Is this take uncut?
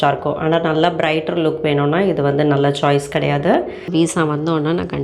no; 1 cut; at 3.8 s

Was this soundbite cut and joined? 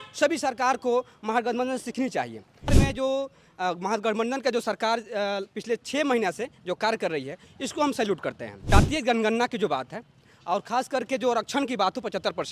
yes; 2 cuts; at 2.7 s, 8.7 s

